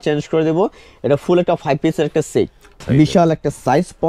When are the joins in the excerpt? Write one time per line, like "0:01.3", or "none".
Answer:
0:02.8

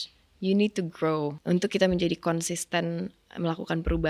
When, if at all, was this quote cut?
0:01.4

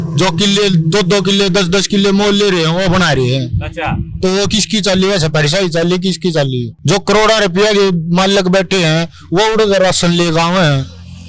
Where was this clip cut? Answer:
0:06.7

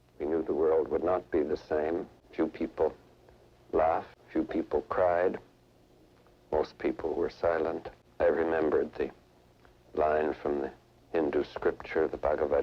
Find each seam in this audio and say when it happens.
0:02.2
0:04.2
0:08.0

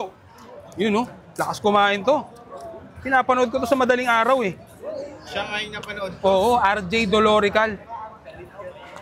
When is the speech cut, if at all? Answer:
none

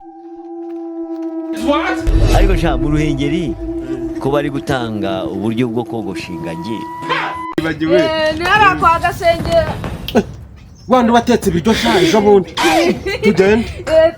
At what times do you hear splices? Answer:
0:07.6

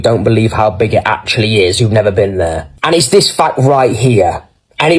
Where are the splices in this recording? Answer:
none

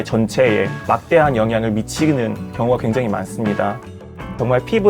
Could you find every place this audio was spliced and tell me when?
0:03.9

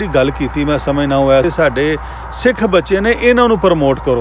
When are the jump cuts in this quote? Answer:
0:01.4

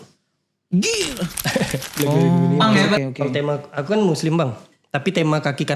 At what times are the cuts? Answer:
0:03.0

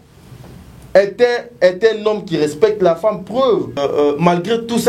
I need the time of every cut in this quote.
0:03.8

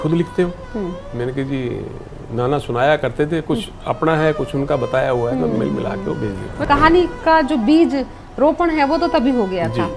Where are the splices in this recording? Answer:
0:06.6

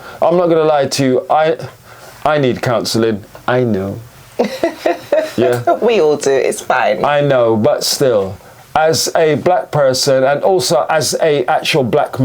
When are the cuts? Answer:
none

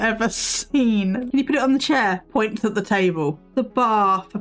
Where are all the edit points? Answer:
0:01.2
0:03.4

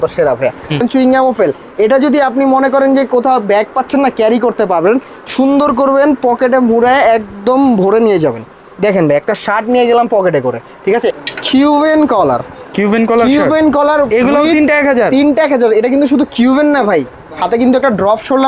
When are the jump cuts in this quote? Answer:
0:00.8
0:11.2

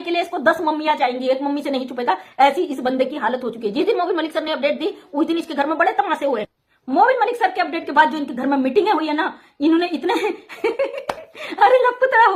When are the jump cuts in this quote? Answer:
none

